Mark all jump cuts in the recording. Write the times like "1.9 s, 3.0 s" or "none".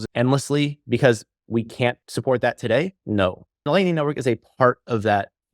1.5 s, 3.7 s